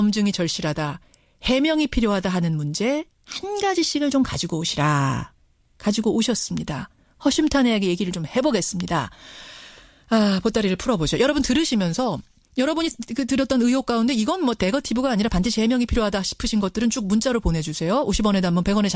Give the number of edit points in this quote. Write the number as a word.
one